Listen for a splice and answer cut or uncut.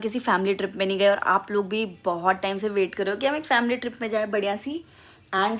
uncut